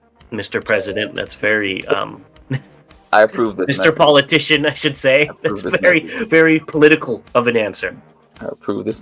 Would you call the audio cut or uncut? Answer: uncut